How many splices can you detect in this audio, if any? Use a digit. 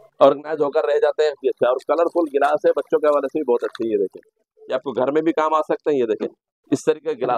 1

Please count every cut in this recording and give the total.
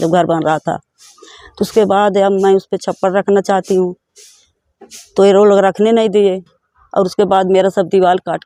0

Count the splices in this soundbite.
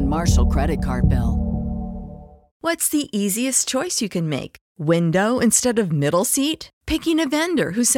1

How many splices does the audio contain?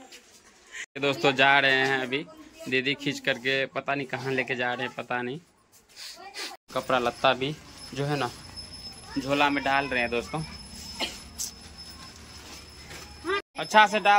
0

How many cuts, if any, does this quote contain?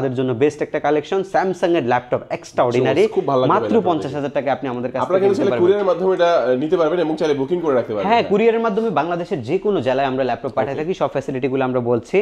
0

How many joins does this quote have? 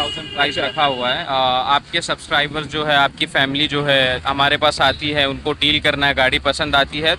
0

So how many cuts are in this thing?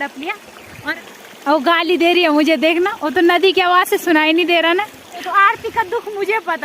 2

